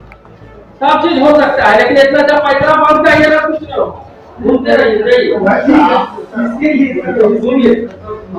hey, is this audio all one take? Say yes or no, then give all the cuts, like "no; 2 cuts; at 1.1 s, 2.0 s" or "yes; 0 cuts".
yes; 0 cuts